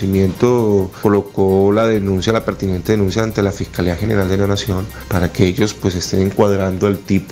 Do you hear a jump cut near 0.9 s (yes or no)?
yes